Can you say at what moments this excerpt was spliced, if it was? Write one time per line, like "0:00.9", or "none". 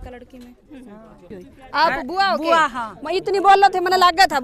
0:01.3